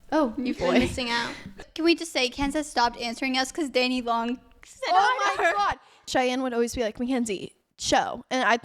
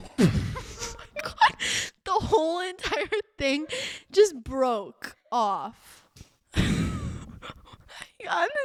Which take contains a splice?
first; 2 cuts; at 1.6 s, 6.1 s

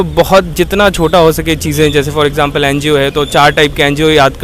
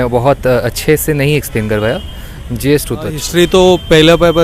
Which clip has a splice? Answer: second; 1 cut; at 3.2 s

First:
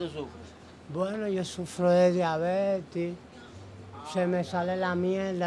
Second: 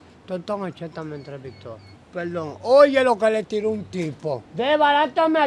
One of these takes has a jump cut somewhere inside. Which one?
second; 2 cuts; at 1.9 s, 4.4 s

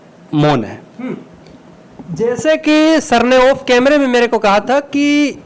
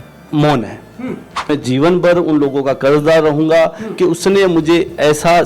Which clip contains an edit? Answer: second; 1 cut; at 1.5 s

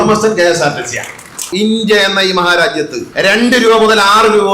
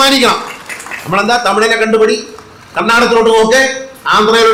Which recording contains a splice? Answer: first; 2 cuts; at 1.5 s, 3.0 s

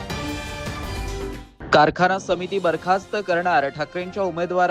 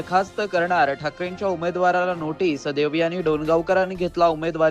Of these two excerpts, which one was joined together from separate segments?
first; 1 cut; at 1.0 s

